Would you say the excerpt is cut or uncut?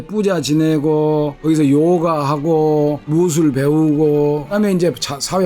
cut